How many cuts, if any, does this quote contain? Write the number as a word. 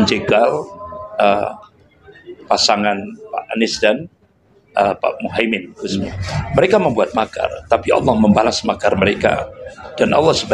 one